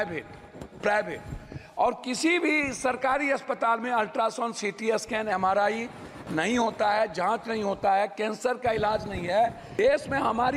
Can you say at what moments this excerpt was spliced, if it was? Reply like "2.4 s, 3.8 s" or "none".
9.6 s